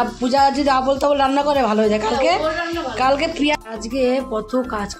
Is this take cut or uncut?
cut